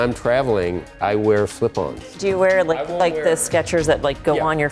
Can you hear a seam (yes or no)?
yes